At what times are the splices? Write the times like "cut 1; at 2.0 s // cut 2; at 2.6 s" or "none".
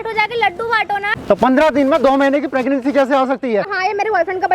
cut 1; at 1.1 s // cut 2; at 3.7 s